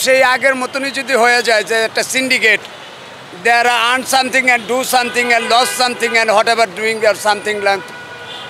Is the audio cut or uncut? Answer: uncut